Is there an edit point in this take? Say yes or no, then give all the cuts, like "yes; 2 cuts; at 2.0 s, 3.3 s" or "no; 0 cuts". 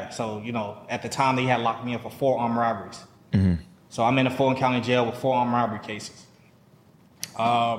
no; 0 cuts